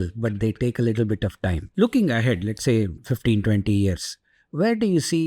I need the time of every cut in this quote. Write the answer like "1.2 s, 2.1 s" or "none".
1.6 s, 3.0 s